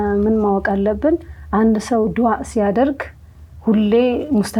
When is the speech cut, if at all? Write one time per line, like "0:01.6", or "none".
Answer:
none